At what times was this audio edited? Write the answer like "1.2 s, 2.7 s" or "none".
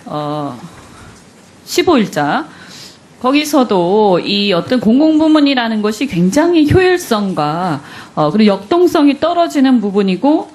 9.0 s